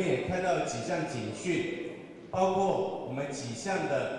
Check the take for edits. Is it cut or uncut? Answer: uncut